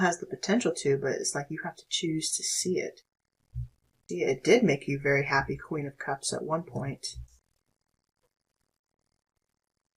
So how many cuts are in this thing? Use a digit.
1